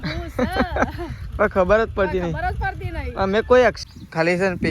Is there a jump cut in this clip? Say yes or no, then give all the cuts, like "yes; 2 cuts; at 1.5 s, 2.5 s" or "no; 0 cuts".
yes; 1 cut; at 3.8 s